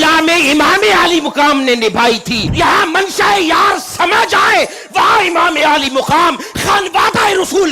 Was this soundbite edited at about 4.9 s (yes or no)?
no